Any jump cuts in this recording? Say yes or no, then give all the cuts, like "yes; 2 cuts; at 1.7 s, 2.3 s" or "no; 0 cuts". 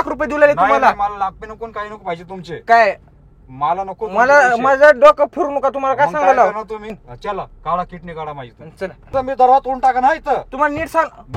yes; 2 cuts; at 7.0 s, 9.1 s